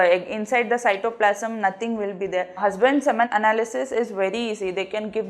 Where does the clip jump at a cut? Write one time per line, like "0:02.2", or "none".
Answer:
0:02.6